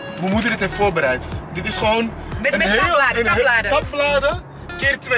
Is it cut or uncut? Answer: uncut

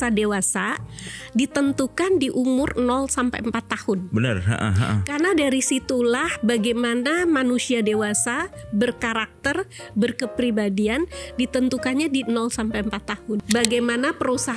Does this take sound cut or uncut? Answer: cut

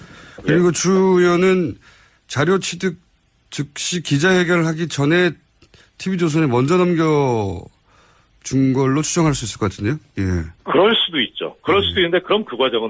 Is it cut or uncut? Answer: cut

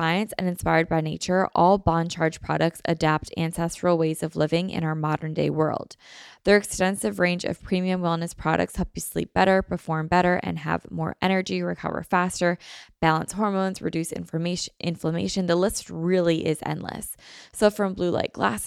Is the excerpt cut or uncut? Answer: uncut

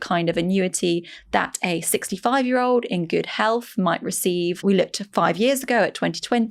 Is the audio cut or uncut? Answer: cut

